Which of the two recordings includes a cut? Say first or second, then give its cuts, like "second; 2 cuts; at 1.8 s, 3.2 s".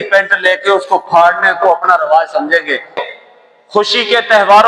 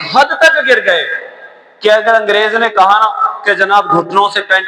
first; 1 cut; at 3.1 s